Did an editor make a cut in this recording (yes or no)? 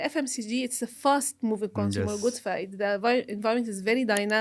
no